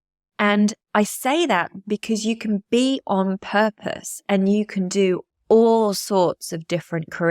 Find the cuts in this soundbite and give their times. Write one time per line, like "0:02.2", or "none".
0:05.3